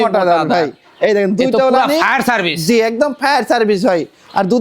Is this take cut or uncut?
uncut